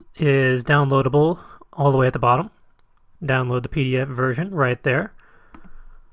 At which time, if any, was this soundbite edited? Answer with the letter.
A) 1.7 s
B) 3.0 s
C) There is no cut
A